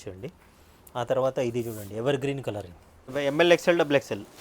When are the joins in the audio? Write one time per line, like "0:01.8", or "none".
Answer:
0:03.1